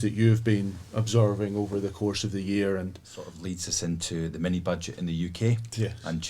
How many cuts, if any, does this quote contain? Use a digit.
1